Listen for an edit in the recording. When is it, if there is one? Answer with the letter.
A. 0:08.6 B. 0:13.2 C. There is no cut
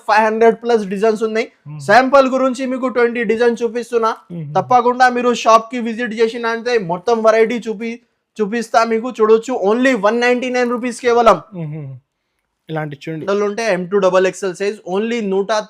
B